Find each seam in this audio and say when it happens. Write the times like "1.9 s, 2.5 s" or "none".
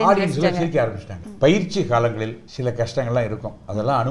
1.2 s, 2.4 s